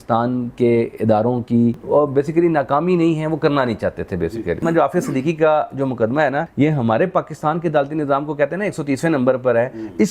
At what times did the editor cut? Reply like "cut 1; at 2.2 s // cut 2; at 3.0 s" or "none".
cut 1; at 1.8 s // cut 2; at 4.6 s // cut 3; at 6.5 s